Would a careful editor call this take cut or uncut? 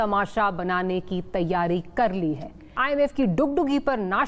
cut